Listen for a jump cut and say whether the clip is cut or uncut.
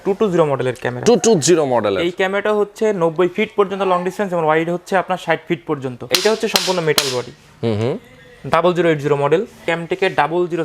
cut